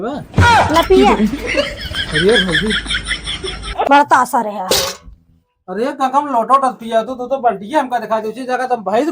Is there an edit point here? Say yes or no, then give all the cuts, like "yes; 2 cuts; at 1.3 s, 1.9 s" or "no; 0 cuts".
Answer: no; 0 cuts